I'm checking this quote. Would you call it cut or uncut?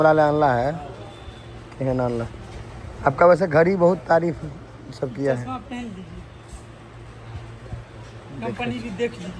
uncut